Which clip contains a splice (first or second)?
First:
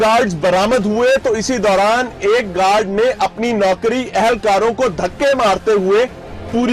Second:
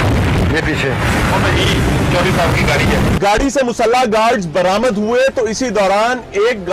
second